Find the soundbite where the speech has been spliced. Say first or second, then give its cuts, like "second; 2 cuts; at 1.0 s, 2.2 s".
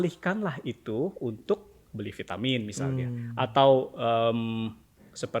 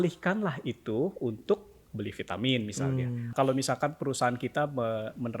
second; 1 cut; at 3.3 s